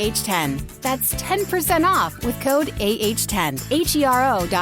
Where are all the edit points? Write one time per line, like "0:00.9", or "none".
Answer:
0:03.6